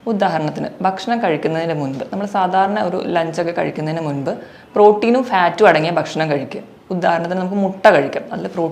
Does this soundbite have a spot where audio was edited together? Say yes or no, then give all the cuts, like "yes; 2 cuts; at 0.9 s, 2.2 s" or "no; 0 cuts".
no; 0 cuts